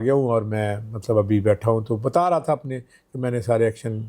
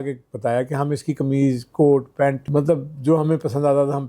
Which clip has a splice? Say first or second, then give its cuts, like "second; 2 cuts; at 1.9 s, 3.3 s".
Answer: second; 1 cut; at 2.4 s